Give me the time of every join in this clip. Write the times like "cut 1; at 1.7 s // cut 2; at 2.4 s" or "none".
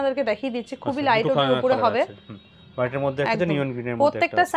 none